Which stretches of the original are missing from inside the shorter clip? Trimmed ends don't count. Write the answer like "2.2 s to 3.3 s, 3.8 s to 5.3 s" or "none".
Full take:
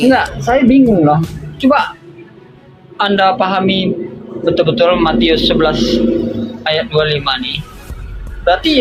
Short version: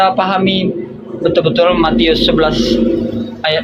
none

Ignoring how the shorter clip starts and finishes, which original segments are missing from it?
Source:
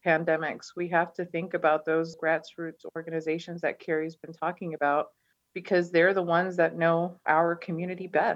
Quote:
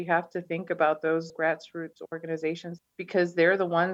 3.5 s to 5.2 s

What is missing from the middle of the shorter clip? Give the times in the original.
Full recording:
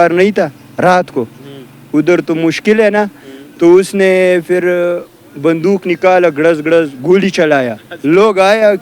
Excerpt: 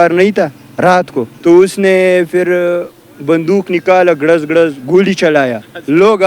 1.2 s to 3.4 s

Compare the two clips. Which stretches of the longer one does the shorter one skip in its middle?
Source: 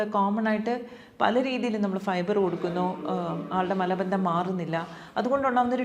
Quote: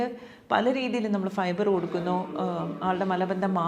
none

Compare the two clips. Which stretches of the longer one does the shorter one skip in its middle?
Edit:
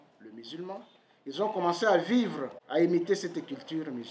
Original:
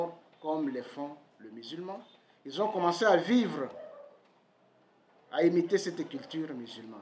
3.7 s to 5.2 s

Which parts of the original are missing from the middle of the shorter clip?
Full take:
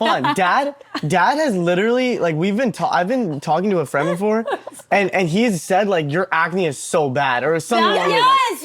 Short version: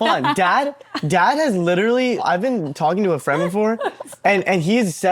2.2 s to 2.9 s

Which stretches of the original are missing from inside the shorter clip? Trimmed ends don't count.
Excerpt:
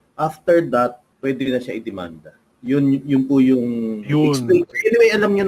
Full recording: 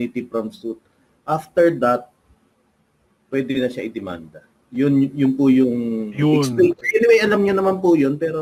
2.2 s to 3.2 s

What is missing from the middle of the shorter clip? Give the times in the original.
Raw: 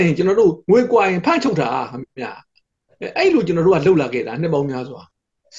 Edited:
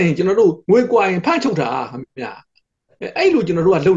none

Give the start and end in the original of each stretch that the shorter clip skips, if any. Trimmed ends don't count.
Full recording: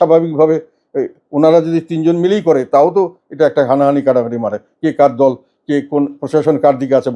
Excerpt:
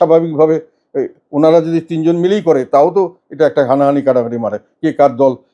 none

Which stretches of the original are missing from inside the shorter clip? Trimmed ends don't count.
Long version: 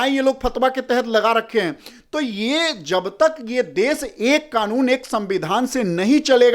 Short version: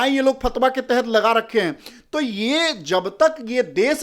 none

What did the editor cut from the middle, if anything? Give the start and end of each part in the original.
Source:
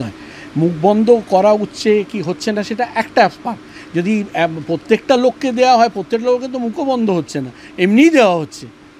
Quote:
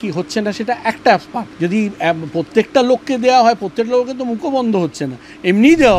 3.5 s to 3.7 s

